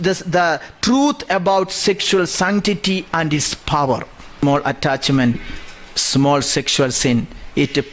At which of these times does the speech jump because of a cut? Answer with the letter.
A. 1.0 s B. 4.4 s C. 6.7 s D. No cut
B